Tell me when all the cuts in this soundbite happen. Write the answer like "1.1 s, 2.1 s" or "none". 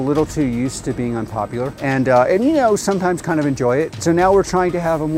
1.8 s, 3.9 s